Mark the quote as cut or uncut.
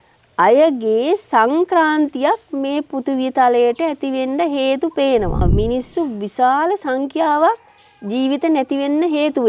cut